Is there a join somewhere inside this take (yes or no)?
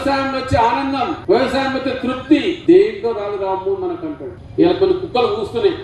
yes